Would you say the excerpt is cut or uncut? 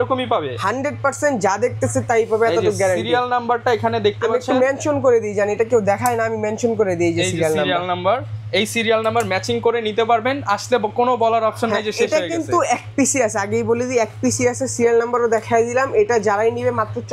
uncut